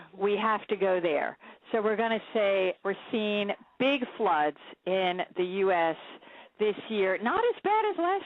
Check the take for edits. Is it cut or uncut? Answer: cut